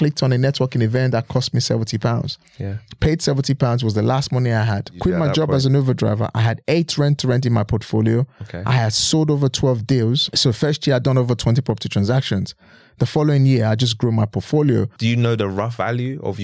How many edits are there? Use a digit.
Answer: 2